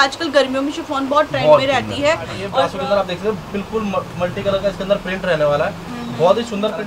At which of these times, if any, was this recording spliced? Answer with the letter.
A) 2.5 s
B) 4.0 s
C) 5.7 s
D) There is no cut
A